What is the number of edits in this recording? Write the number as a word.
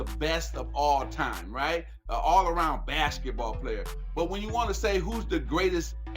zero